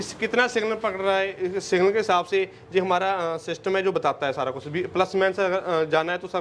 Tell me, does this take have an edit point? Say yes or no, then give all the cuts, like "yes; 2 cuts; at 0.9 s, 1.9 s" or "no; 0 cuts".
no; 0 cuts